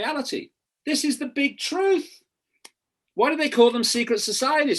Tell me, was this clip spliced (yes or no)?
no